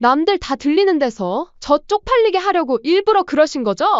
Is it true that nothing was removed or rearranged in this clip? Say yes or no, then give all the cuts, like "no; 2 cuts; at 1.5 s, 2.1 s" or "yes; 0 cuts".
yes; 0 cuts